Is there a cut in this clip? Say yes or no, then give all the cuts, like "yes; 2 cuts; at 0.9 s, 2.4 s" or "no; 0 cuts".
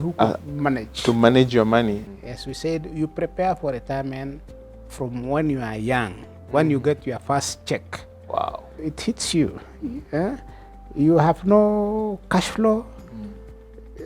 yes; 2 cuts; at 2.1 s, 8.9 s